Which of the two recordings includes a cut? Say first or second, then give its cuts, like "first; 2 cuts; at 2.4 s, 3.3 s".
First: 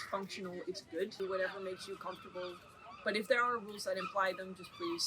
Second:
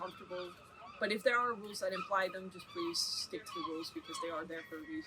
first; 1 cut; at 1.1 s